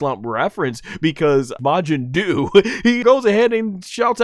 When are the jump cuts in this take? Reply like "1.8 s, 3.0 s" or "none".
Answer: 1.5 s, 3.0 s